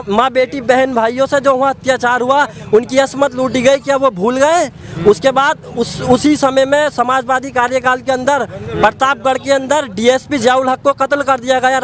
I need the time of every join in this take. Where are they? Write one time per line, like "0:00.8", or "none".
none